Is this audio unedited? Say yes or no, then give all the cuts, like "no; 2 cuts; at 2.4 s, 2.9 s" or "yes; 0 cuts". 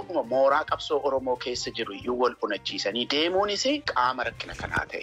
no; 1 cut; at 3.9 s